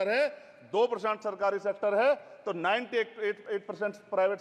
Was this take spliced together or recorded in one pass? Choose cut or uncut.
uncut